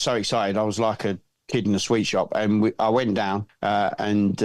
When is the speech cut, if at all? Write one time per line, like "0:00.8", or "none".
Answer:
0:03.5